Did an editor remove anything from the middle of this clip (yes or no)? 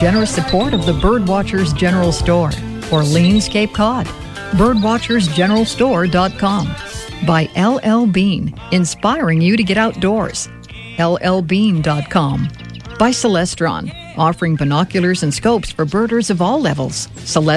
no